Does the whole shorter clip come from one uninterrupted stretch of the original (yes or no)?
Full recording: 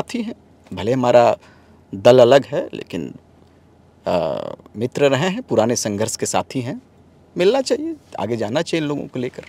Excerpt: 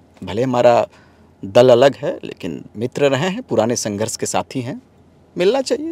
no